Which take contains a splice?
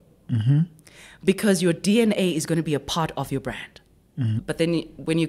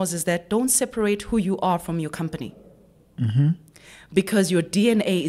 first; 1 cut; at 4.4 s

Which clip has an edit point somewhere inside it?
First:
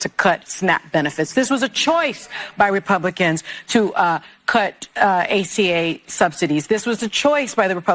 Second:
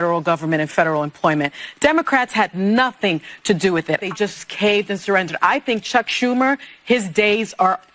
second; 1 cut; at 4.1 s

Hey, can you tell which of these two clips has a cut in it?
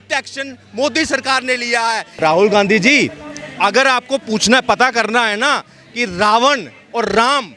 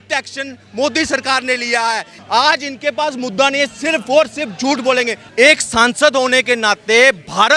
second; 2 cuts; at 2.1 s, 5.2 s

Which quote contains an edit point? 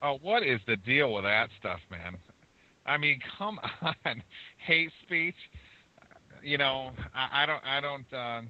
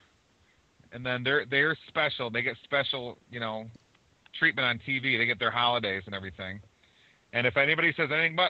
first; 1 cut; at 6.2 s

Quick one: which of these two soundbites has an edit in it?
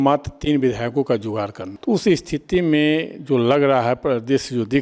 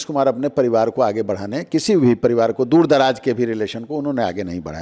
first; 1 cut; at 1.7 s

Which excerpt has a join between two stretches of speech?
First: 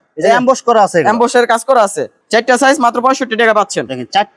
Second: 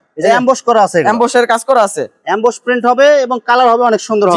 first; 1 cut; at 2.2 s

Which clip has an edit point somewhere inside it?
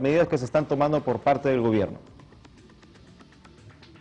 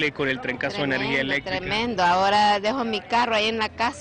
second; 1 cut; at 2.2 s

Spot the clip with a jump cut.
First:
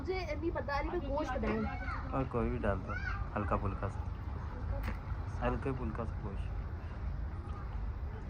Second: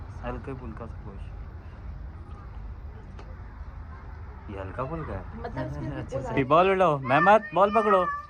second; 1 cut; at 6.4 s

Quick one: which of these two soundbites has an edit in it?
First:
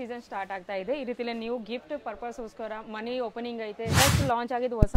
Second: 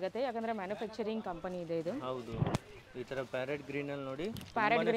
first; 1 cut; at 4.0 s

